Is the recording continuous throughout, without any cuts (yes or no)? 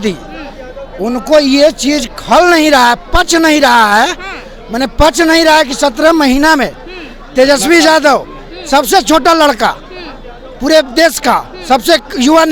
yes